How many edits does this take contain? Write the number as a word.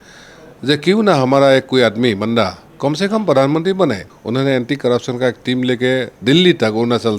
one